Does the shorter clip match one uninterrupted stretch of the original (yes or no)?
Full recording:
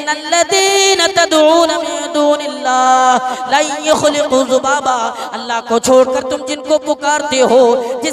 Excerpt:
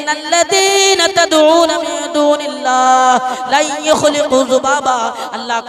yes